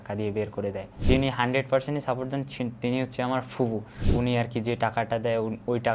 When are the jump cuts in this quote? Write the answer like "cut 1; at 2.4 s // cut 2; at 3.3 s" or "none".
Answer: cut 1; at 1.0 s // cut 2; at 4.0 s